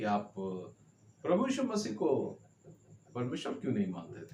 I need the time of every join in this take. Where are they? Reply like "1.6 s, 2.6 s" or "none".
none